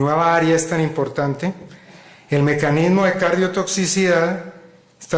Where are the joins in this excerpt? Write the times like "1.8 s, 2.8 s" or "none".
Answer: none